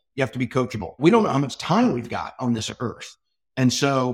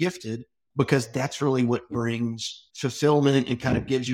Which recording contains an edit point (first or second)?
first